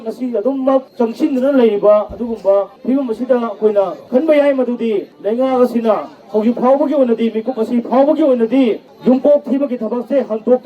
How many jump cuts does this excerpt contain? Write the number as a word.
five